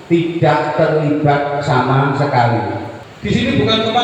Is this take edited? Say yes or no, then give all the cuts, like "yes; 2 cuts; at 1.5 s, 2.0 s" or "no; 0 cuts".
yes; 1 cut; at 2.9 s